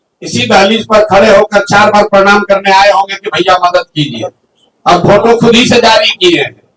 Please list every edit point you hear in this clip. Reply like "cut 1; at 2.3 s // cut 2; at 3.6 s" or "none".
none